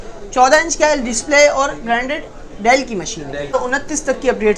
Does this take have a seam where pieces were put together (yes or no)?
yes